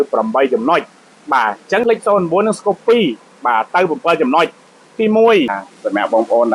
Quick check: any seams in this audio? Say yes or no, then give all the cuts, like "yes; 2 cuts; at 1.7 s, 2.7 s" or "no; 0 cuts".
yes; 2 cuts; at 1.8 s, 5.7 s